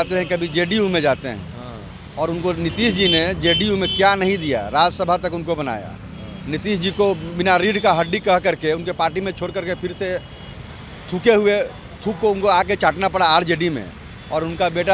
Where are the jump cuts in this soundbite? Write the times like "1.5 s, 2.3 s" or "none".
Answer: none